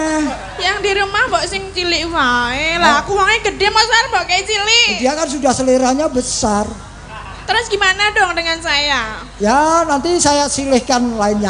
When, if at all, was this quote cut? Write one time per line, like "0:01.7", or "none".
none